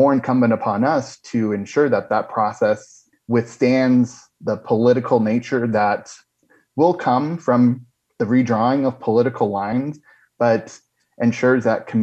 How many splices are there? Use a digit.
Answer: 1